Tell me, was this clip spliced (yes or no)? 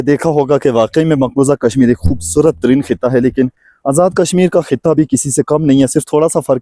no